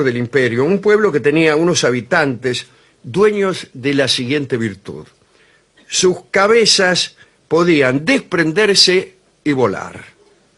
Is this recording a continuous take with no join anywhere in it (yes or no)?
no